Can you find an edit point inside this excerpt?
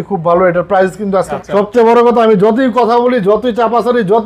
yes; 1 cut; at 1.3 s

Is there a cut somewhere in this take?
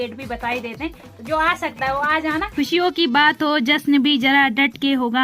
yes; 1 cut; at 2.5 s

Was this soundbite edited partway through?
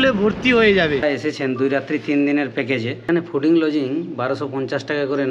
yes; 1 cut; at 1.0 s

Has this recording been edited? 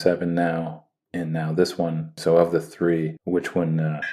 yes; 2 cuts; at 2.1 s, 3.2 s

